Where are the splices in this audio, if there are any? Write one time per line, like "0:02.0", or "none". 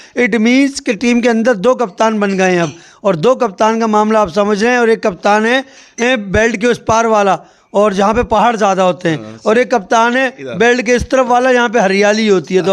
none